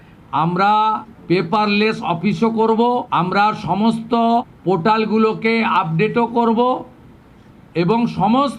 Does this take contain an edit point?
yes; 3 cuts; at 1.1 s, 3.1 s, 4.5 s

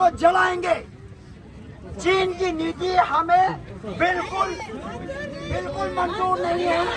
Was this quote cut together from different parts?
no; 0 cuts

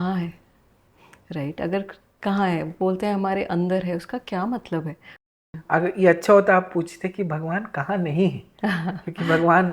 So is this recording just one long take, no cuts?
no; 1 cut; at 5.1 s

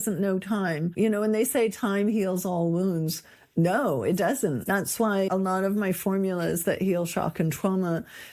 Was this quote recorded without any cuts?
no; 2 cuts; at 0.9 s, 5.1 s

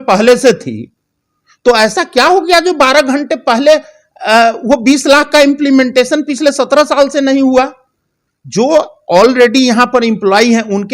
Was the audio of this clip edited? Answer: yes; 1 cut; at 8.2 s

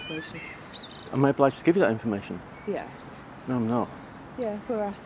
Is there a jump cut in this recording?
no; 0 cuts

